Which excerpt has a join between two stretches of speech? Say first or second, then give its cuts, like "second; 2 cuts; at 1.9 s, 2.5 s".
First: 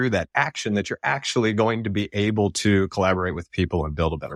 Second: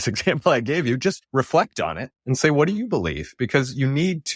second; 2 cuts; at 1.2 s, 2.1 s